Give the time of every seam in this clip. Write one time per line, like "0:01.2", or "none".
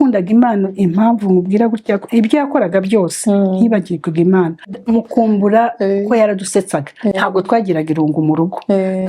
0:04.7